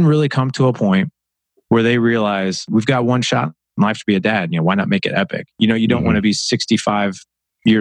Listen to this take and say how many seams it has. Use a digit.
1